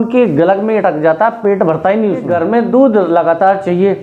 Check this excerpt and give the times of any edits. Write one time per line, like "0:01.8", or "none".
0:02.3